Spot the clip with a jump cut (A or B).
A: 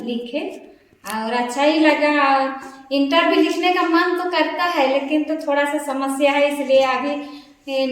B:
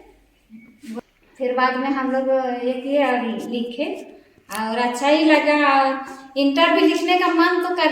B